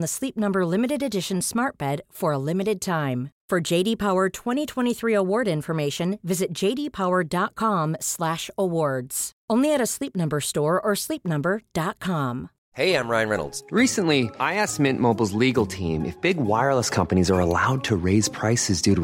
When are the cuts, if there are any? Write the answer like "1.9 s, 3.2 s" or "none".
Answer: 12.5 s